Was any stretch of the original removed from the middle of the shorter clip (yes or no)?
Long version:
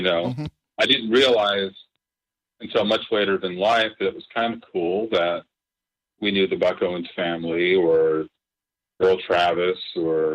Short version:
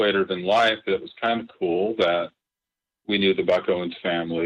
no